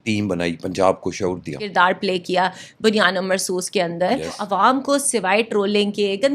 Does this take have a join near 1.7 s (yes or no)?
yes